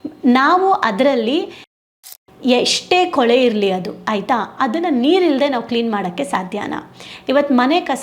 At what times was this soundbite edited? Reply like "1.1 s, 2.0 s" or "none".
1.7 s